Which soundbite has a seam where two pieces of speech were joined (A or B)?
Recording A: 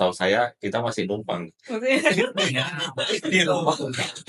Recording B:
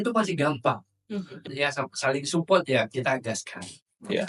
B